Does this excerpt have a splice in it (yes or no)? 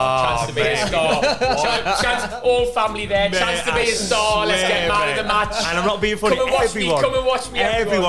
no